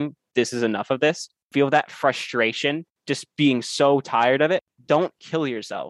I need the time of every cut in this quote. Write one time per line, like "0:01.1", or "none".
0:01.5
0:03.0
0:04.7